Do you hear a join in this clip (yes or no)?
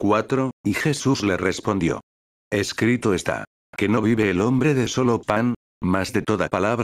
no